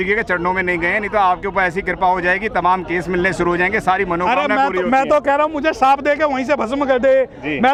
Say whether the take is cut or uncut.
uncut